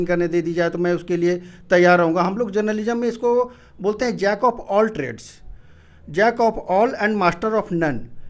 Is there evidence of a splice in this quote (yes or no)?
no